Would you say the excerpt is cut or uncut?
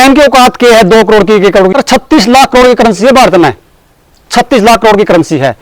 cut